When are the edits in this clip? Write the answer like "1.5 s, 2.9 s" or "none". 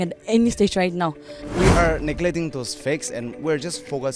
1.5 s